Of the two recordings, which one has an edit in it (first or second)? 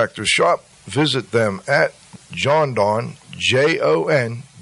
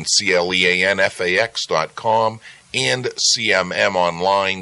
first